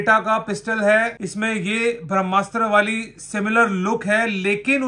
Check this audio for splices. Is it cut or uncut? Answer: cut